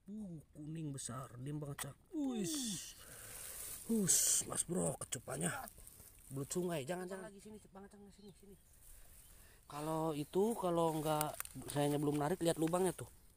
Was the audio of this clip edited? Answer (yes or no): yes